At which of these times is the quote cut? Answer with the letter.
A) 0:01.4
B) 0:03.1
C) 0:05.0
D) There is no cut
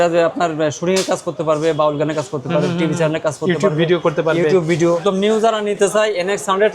C